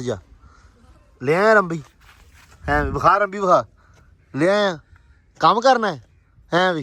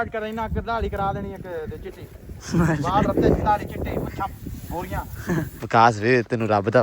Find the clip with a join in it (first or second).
second